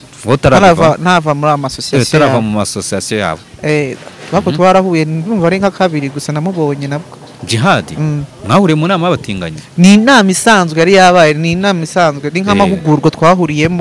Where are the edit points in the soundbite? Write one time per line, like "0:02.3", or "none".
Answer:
none

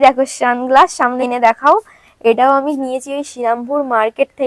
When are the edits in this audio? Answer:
0:01.2

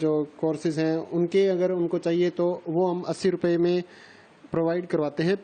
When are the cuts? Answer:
0:01.3

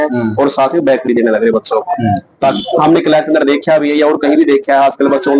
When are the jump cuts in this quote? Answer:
0:02.5

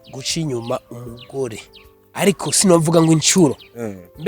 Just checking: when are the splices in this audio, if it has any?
none

